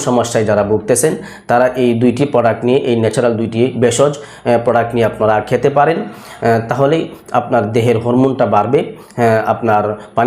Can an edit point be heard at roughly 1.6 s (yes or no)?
no